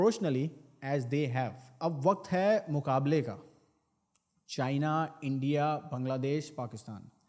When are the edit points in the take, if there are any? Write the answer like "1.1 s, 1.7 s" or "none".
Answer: 1.8 s